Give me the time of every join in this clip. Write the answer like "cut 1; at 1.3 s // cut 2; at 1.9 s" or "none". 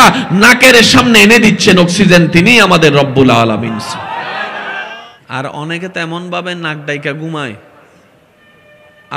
cut 1; at 4.8 s